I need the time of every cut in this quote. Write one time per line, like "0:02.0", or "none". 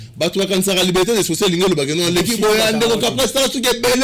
none